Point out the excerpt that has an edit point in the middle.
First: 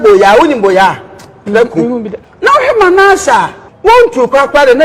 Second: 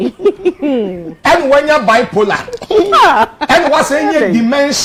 first; 2 cuts; at 2.2 s, 3.6 s

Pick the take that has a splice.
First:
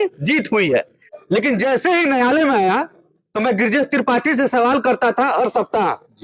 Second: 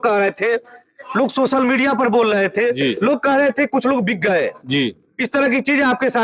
first; 1 cut; at 1.0 s

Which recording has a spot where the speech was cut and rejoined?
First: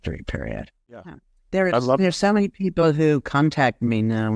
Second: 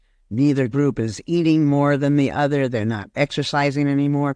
first; 1 cut; at 1.1 s

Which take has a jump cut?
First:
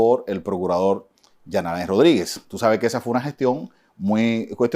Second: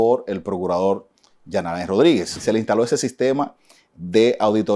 second; 1 cut; at 2.4 s

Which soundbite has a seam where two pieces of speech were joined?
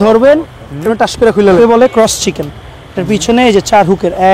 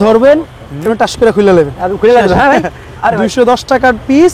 first; 1 cut; at 1.6 s

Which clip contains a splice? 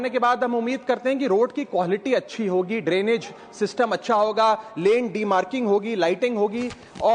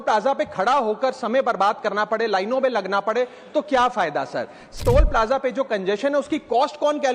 second; 1 cut; at 4.7 s

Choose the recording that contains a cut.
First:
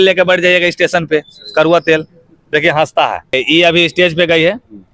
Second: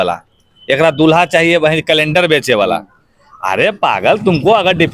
first; 1 cut; at 3.3 s

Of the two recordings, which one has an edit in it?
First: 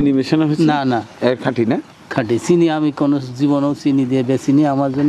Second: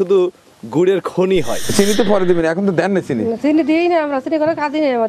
second; 1 cut; at 1.7 s

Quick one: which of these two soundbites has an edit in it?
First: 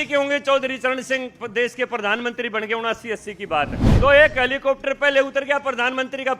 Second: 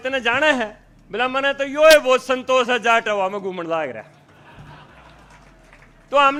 first; 1 cut; at 3.8 s

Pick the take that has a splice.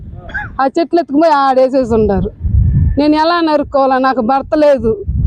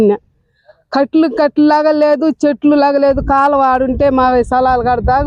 first; 1 cut; at 3.6 s

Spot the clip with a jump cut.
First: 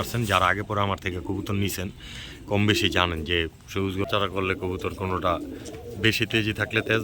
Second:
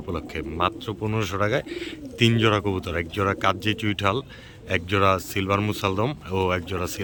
first; 1 cut; at 4.1 s

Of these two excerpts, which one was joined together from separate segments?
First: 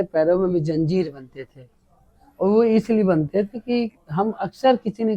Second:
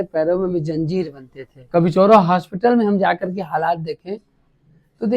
second; 1 cut; at 1.6 s

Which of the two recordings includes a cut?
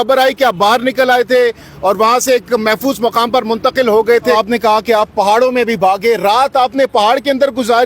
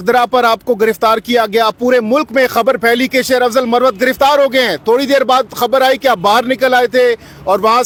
first; 1 cut; at 4.3 s

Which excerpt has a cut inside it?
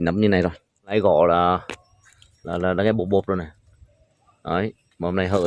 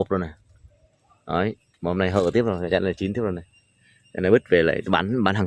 first; 1 cut; at 0.9 s

